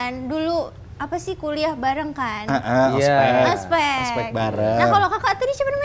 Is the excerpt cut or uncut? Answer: uncut